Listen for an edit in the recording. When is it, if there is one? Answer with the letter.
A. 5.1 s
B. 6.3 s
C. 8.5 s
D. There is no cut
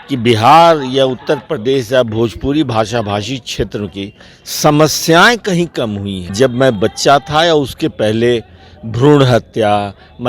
B